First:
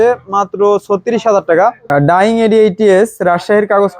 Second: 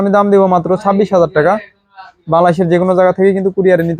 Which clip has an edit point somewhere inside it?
first; 1 cut; at 1.8 s

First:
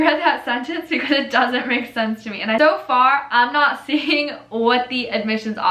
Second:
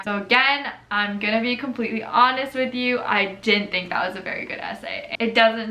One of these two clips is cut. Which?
first; 1 cut; at 2.6 s

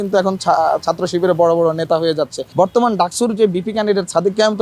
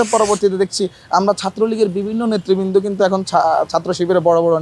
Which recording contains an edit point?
first; 1 cut; at 2.7 s

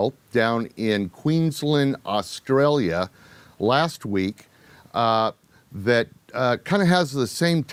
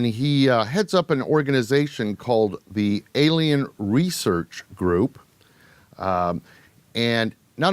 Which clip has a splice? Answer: second; 1 cut; at 4.3 s

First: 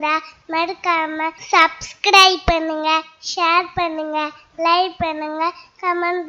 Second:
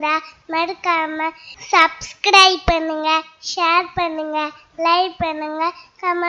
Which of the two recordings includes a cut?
first; 1 cut; at 1.4 s

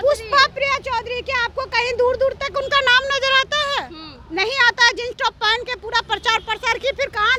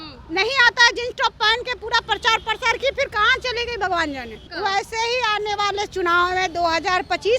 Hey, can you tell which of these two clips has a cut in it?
second; 1 cut; at 4.5 s

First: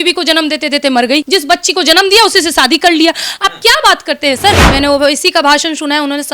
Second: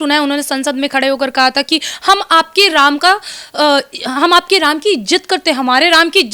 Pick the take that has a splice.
first; 2 cuts; at 1.2 s, 4.7 s

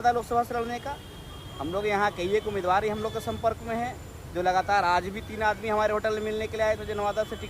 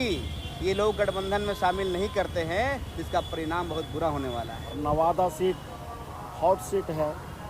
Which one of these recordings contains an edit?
second; 1 cut; at 4.8 s

